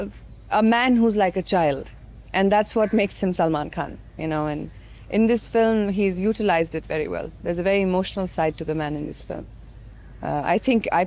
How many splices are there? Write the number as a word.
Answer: zero